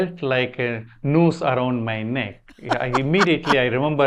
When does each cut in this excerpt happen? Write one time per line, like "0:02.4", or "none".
none